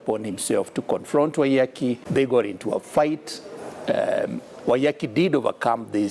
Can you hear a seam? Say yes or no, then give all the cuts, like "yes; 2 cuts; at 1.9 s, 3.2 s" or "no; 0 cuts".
yes; 1 cut; at 2.0 s